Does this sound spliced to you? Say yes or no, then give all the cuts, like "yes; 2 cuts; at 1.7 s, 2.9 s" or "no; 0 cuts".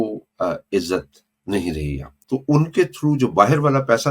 yes; 1 cut; at 2.1 s